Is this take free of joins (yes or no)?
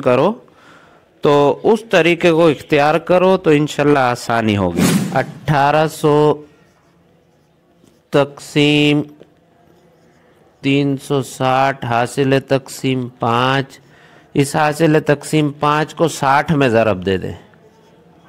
no